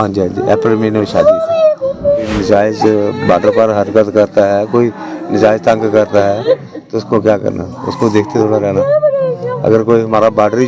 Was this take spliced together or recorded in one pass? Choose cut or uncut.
cut